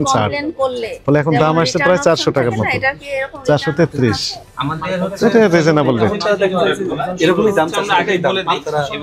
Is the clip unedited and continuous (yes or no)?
yes